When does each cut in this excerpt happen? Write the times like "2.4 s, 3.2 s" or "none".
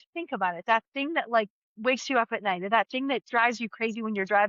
1.6 s, 3.2 s